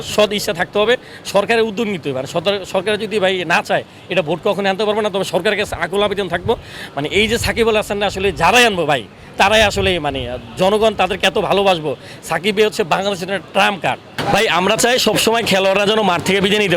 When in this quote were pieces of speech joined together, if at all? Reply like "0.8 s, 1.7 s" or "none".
14.1 s